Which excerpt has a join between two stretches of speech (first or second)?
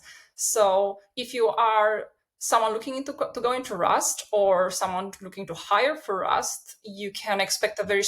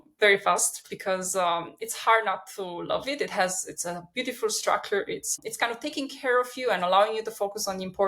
second